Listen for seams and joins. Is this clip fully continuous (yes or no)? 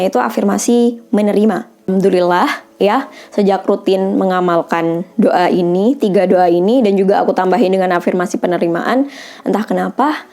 no